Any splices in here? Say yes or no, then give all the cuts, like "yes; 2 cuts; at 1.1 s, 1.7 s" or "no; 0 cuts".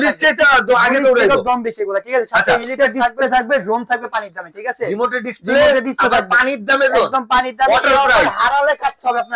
yes; 1 cut; at 3.2 s